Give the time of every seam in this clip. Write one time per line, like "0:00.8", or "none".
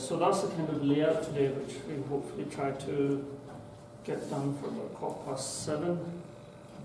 0:04.9